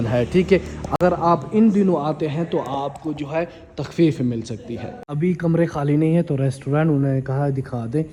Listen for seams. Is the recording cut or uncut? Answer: uncut